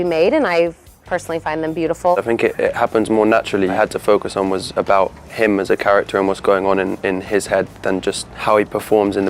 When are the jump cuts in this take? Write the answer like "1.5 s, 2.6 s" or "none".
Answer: 2.2 s, 3.7 s, 8.3 s